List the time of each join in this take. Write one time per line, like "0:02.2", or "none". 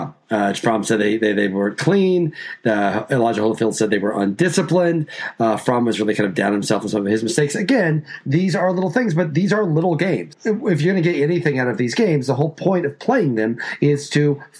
none